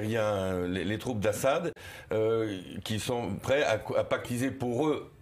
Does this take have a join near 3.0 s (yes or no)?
no